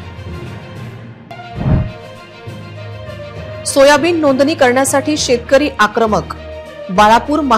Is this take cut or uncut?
cut